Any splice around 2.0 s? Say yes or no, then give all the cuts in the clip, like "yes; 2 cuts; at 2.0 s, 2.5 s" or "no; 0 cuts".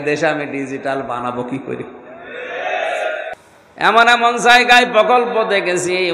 no; 1 cut; at 3.3 s